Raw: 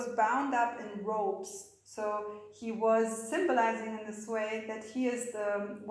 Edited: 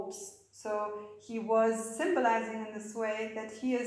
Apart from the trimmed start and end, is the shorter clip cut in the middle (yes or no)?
no